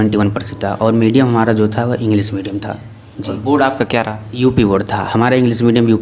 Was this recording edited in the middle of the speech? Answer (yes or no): no